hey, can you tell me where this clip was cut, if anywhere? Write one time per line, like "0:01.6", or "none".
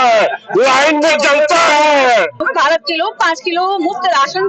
0:02.4

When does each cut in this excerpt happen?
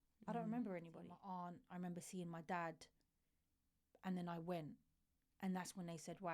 0:01.2

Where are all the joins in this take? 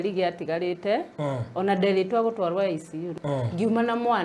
0:03.1

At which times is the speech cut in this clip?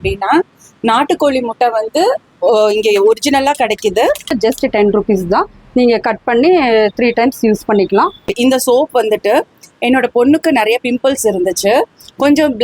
0:04.3
0:08.3

